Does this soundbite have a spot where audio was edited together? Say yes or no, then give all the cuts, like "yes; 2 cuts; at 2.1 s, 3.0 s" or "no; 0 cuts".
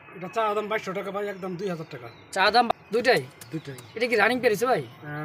yes; 1 cut; at 2.7 s